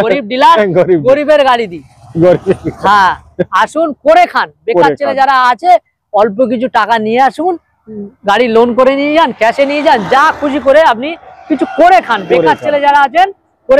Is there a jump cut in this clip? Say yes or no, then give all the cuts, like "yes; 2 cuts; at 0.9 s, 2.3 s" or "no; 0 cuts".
no; 0 cuts